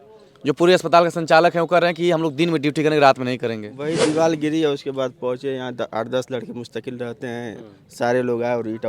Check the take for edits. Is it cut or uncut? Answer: cut